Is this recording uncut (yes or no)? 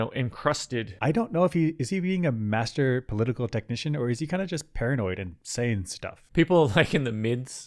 no